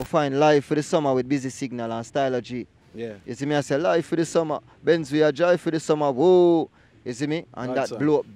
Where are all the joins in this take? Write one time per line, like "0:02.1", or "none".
none